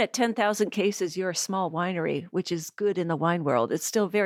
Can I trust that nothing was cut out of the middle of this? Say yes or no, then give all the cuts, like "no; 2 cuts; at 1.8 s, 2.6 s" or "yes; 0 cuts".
yes; 0 cuts